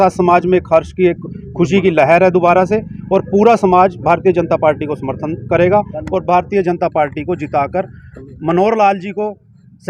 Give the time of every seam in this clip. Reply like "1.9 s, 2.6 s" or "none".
none